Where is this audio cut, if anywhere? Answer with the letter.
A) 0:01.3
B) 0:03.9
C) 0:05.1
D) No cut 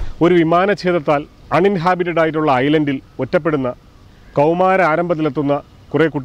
A